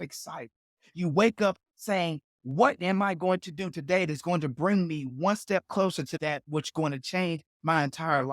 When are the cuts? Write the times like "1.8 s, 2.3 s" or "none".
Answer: 6.1 s